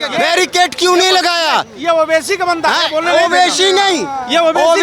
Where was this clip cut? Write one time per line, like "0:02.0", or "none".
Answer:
none